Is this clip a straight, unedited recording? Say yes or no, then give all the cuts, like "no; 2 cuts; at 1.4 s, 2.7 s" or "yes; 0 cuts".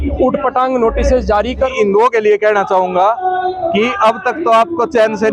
no; 1 cut; at 1.7 s